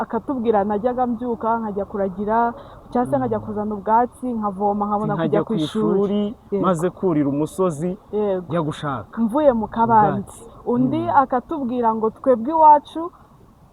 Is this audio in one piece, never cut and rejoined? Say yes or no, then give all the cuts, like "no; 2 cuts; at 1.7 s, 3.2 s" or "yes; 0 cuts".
yes; 0 cuts